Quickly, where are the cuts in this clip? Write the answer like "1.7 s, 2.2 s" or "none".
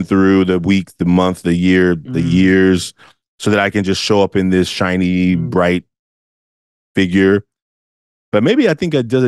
none